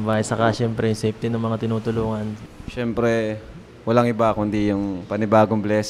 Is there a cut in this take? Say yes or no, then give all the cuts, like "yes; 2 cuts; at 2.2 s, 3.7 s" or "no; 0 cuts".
yes; 1 cut; at 2.4 s